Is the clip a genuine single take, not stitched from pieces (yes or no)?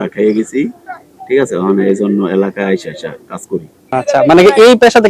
no